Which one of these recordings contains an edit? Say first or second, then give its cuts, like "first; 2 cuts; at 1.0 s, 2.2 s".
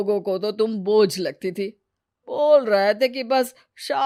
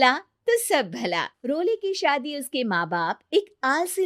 second; 1 cut; at 1.3 s